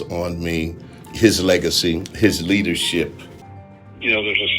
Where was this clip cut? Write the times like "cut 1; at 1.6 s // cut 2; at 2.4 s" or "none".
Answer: cut 1; at 3.6 s